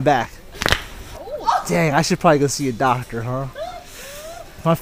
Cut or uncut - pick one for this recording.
cut